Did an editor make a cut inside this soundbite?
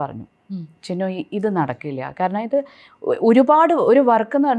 no; 0 cuts

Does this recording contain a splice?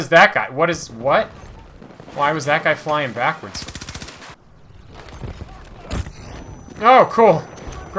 yes; 1 cut; at 4.3 s

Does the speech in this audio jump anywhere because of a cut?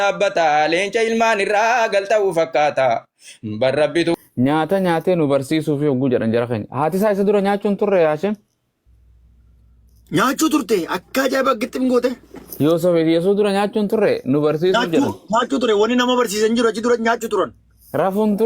yes; 1 cut; at 4.2 s

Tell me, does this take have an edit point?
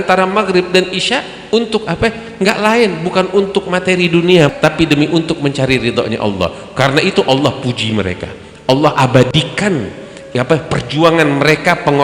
yes; 1 cut; at 4.5 s

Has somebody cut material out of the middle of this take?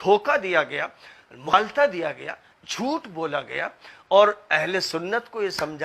yes; 1 cut; at 1.5 s

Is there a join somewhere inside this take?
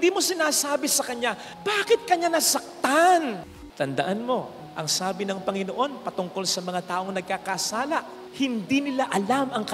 yes; 1 cut; at 3.6 s

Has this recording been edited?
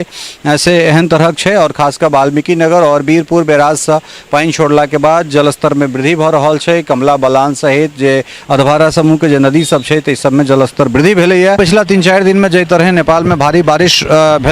yes; 1 cut; at 11.6 s

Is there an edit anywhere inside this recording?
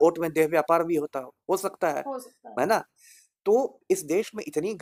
no; 0 cuts

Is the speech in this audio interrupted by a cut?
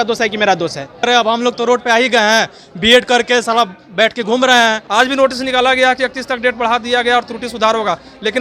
yes; 2 cuts; at 1.1 s, 4.8 s

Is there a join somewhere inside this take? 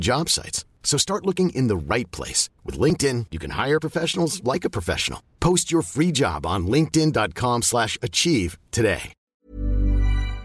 yes; 1 cut; at 9.3 s

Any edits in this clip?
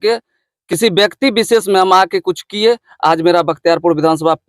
no; 0 cuts

